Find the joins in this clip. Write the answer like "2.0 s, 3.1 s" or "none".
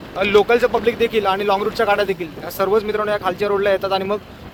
none